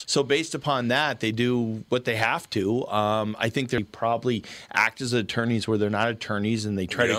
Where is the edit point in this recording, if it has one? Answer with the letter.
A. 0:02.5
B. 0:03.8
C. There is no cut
B